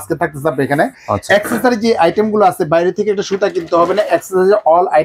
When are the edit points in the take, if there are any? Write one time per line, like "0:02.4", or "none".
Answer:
none